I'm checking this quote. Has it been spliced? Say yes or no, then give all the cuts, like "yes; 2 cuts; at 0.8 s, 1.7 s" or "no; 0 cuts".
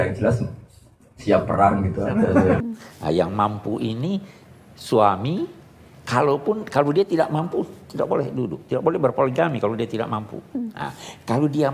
yes; 1 cut; at 2.6 s